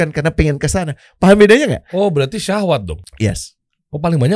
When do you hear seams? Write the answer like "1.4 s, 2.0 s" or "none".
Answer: 3.0 s